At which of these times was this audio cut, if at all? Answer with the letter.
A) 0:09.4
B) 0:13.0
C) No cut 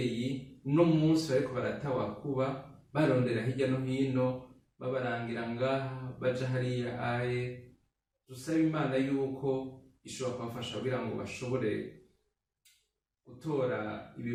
C